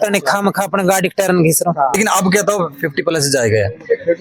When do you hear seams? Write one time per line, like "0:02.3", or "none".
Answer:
0:02.0